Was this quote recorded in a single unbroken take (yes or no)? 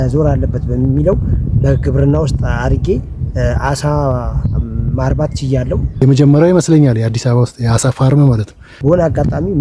no